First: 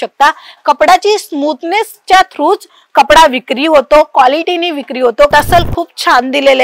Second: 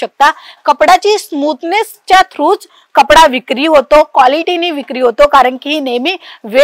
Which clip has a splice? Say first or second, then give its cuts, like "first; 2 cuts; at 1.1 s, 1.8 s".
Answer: first; 1 cut; at 5.3 s